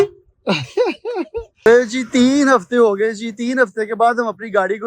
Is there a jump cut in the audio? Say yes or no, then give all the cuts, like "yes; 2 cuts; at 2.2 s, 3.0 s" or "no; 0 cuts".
yes; 1 cut; at 1.4 s